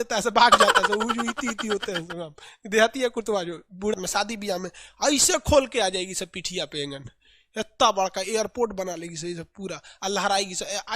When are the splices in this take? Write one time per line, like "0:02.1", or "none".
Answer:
0:03.9

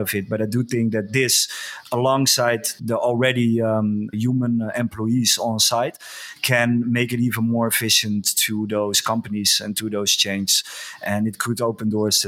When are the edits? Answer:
0:02.8
0:04.1

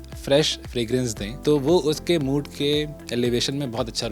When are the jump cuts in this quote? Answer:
0:01.3
0:03.0

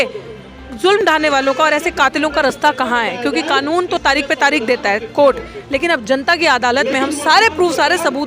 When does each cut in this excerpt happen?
none

